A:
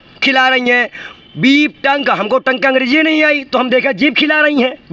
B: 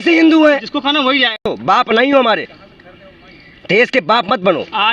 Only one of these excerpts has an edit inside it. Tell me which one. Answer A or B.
B